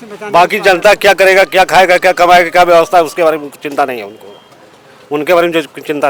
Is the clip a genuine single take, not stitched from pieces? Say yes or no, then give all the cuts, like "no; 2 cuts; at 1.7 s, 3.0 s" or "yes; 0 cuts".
yes; 0 cuts